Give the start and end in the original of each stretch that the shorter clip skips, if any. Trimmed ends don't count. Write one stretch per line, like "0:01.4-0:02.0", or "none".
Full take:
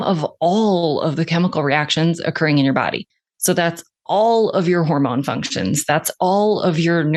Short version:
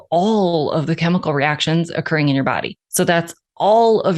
0:03.1-0:03.3